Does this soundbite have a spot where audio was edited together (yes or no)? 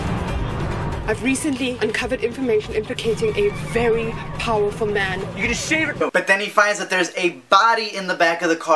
no